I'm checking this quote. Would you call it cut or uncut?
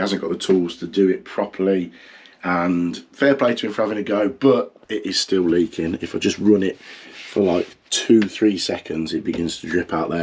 uncut